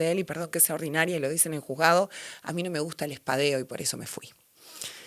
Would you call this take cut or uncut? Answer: uncut